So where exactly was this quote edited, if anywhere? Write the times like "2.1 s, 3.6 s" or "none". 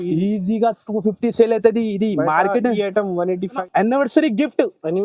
3.5 s